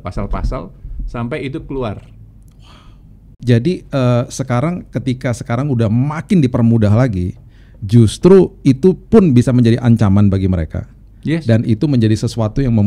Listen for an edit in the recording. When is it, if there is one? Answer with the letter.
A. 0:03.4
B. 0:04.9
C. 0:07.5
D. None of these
A